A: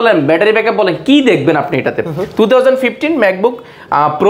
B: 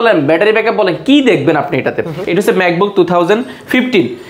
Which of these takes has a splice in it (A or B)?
B